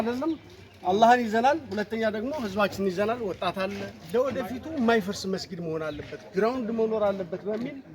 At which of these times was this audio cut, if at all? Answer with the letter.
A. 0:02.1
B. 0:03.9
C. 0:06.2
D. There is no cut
B